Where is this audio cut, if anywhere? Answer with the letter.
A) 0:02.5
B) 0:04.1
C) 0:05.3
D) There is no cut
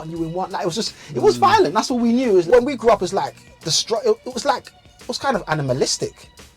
A